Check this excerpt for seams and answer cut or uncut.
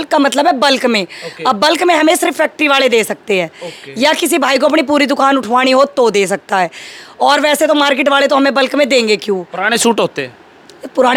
uncut